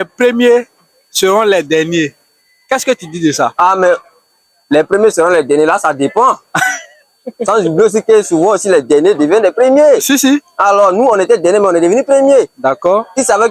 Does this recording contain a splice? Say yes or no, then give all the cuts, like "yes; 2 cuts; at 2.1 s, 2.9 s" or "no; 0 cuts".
no; 0 cuts